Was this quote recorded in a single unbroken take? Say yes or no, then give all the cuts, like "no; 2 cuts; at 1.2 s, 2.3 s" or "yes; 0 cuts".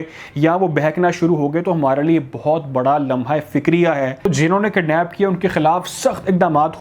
no; 1 cut; at 4.3 s